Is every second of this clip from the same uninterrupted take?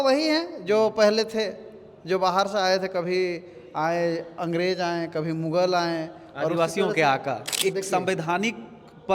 no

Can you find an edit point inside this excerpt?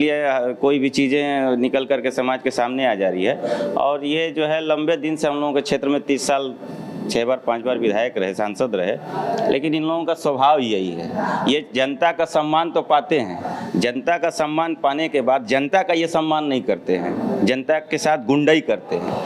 no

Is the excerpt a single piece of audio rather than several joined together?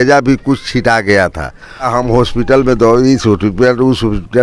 no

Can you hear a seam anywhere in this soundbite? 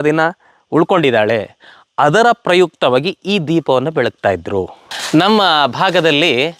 yes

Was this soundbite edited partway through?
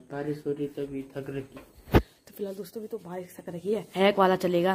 yes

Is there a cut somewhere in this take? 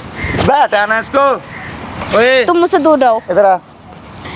no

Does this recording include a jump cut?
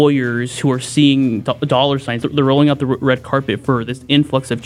yes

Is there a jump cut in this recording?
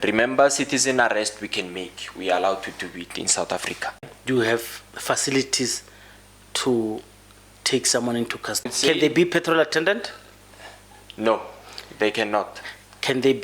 yes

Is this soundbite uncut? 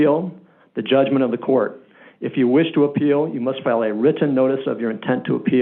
yes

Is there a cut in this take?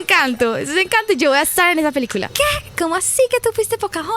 yes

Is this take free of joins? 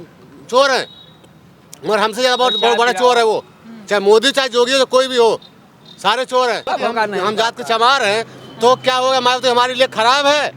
no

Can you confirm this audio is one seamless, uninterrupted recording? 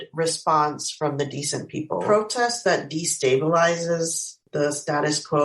no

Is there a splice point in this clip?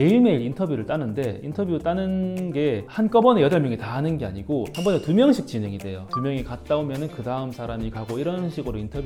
no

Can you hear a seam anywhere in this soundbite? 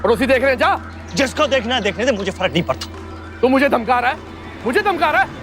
yes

